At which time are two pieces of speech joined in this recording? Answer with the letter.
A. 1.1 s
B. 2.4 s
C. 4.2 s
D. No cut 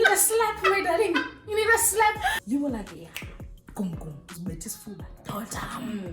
B